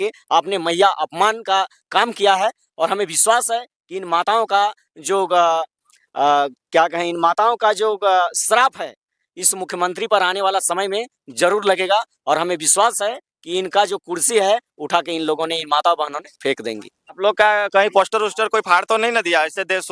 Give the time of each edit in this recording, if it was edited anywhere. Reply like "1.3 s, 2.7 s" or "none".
17.2 s